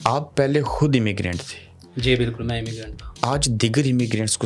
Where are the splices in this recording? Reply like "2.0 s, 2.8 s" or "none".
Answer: none